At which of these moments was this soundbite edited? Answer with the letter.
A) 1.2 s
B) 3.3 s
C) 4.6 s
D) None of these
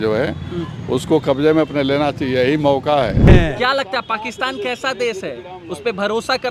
B